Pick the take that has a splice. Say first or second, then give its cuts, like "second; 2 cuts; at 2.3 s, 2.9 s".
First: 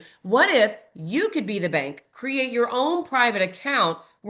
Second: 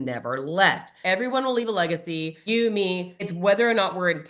second; 3 cuts; at 0.9 s, 2.3 s, 3.2 s